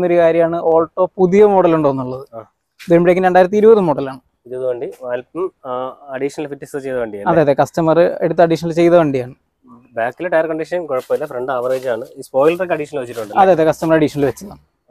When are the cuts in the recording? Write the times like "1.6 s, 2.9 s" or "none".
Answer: none